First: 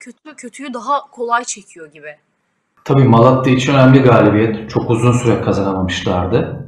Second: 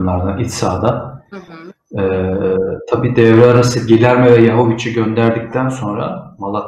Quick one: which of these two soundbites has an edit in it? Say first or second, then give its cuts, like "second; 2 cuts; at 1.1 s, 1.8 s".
first; 1 cut; at 2.7 s